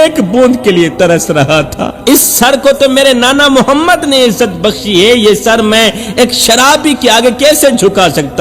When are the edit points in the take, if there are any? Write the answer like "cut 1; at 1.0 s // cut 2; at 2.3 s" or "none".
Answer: cut 1; at 1.9 s

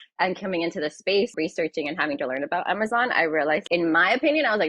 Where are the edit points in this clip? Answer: cut 1; at 1.3 s // cut 2; at 3.6 s

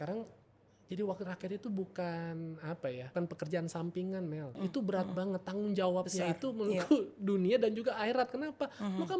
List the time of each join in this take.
cut 1; at 3.1 s // cut 2; at 4.5 s

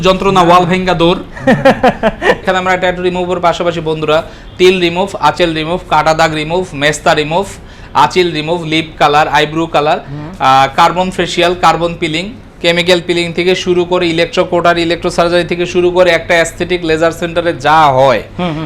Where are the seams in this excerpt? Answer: cut 1; at 2.4 s

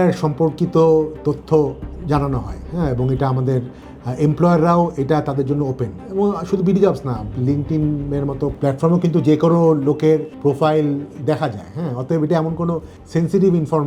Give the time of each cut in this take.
cut 1; at 8.5 s // cut 2; at 10.3 s // cut 3; at 12.9 s

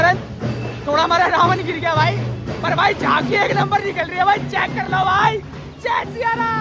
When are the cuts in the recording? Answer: none

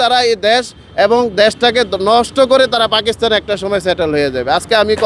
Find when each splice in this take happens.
none

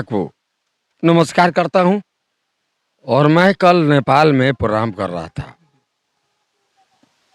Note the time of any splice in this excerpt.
none

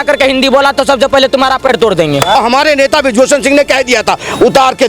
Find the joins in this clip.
cut 1; at 2.4 s

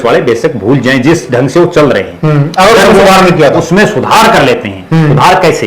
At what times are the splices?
none

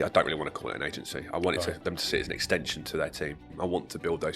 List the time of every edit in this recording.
cut 1; at 3.5 s

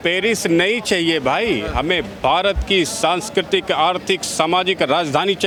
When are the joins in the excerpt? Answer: none

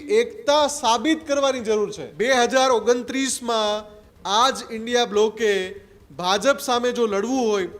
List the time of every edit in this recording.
cut 1; at 2.0 s

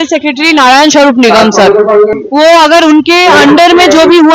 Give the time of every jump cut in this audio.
cut 1; at 2.1 s

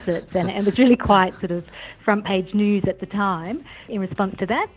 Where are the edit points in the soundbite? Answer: cut 1; at 3.8 s

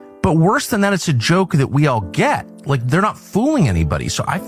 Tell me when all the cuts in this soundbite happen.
none

